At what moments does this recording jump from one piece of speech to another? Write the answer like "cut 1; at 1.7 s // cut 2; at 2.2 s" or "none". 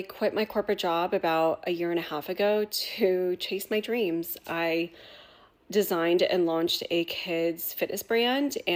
none